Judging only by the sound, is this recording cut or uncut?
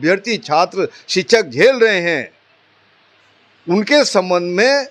uncut